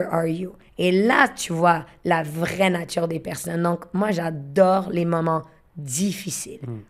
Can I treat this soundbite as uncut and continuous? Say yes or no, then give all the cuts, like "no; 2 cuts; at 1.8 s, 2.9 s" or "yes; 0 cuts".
yes; 0 cuts